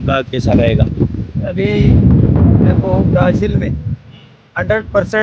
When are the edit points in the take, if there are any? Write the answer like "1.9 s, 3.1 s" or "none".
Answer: none